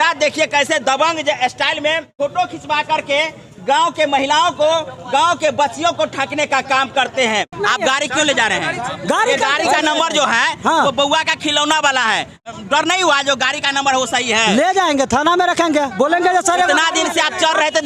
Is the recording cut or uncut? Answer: cut